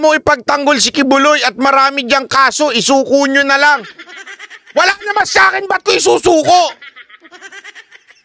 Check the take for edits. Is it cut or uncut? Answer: uncut